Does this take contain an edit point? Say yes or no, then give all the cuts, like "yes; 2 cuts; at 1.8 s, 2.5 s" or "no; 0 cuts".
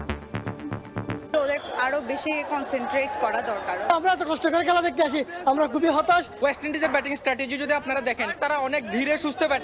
yes; 3 cuts; at 1.2 s, 3.9 s, 6.3 s